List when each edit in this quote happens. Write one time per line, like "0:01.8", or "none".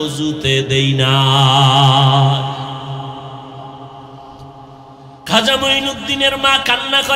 none